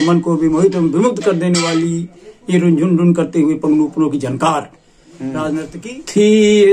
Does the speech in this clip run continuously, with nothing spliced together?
no; 1 cut; at 5.7 s

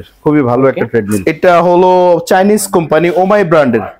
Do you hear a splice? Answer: yes; 1 cut; at 1.2 s

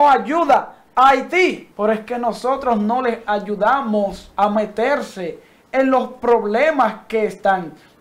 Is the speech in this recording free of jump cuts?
no; 2 cuts; at 1.7 s, 4.2 s

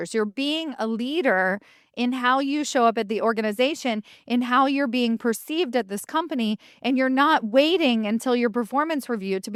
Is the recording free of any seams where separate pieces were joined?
yes; 0 cuts

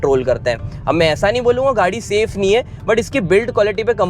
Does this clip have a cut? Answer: no; 0 cuts

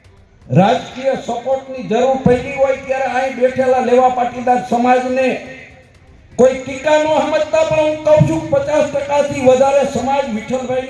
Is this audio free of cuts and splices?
yes; 0 cuts

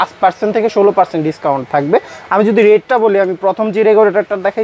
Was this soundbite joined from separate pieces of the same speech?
no; 0 cuts

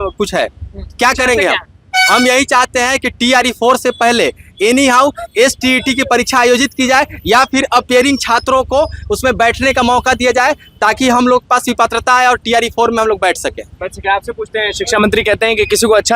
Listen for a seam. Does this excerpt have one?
no; 0 cuts

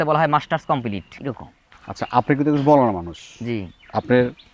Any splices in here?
yes; 1 cut; at 1.1 s

